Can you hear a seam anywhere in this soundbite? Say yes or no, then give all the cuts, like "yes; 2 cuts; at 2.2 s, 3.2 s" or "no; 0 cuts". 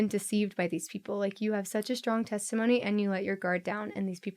no; 0 cuts